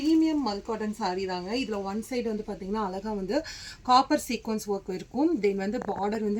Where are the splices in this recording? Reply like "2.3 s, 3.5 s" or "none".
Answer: none